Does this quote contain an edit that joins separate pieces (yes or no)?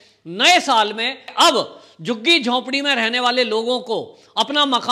yes